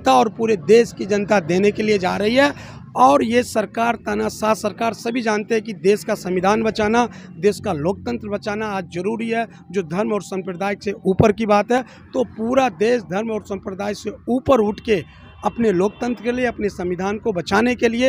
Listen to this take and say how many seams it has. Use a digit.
0